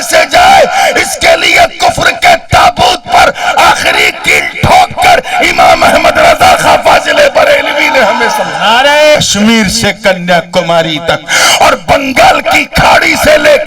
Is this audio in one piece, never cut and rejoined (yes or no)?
no